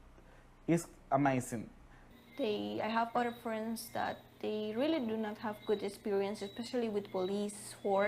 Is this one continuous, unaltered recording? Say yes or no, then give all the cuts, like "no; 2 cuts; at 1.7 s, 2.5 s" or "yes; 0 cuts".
no; 1 cut; at 2.0 s